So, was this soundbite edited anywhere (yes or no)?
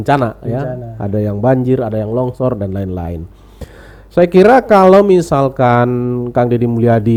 no